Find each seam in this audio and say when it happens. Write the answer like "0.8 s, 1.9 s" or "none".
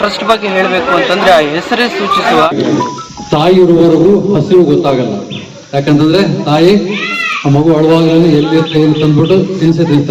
2.5 s